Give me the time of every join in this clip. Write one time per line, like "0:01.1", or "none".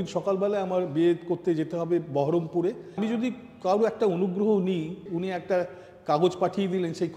0:03.0
0:05.0